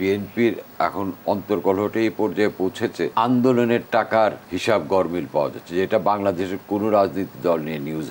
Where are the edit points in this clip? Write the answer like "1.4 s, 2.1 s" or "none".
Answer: 3.1 s, 4.5 s